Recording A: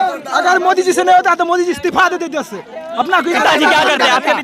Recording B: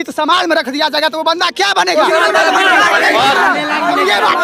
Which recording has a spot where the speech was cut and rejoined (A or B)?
A